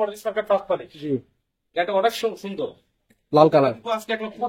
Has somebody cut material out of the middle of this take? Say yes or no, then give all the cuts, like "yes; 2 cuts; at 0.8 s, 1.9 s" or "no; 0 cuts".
no; 0 cuts